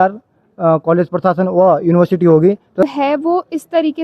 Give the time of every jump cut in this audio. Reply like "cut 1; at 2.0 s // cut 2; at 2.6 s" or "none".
cut 1; at 2.8 s

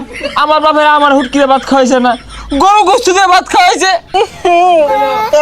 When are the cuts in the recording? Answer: cut 1; at 4.1 s

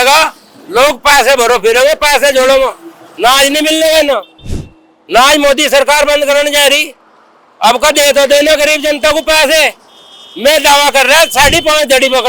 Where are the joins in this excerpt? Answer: none

